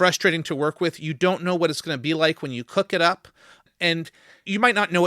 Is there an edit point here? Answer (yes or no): yes